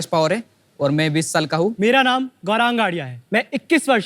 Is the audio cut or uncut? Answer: cut